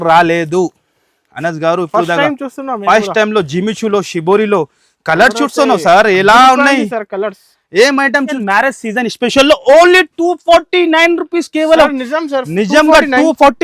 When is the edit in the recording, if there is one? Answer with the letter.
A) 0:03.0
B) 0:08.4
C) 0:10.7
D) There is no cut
B